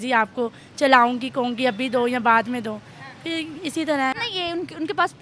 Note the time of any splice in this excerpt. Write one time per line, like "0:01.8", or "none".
0:04.2